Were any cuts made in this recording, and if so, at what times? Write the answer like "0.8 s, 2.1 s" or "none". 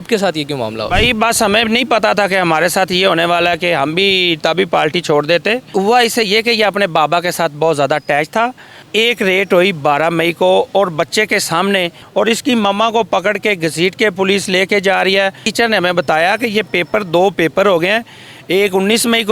5.6 s, 8.8 s, 12.0 s, 15.4 s